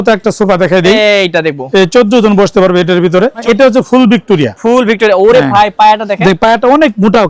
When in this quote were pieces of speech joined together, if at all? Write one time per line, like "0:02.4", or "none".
0:03.4